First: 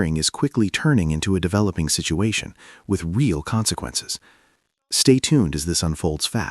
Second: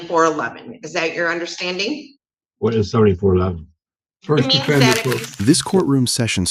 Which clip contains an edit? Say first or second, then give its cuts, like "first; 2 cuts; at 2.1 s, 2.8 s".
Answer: second; 1 cut; at 5.3 s